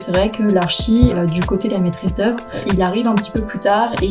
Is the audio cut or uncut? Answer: cut